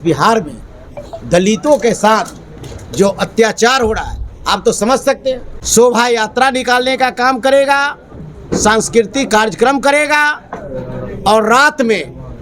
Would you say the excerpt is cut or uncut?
cut